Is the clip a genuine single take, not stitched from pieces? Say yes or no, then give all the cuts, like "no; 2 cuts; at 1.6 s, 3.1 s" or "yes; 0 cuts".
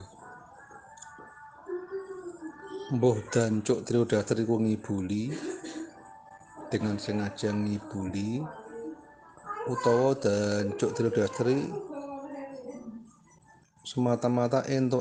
yes; 0 cuts